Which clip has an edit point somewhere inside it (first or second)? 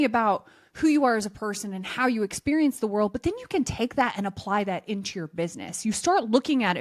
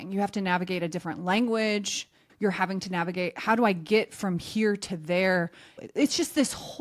second